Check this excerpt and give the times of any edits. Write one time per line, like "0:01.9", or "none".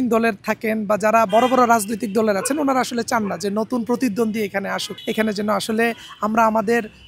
0:04.9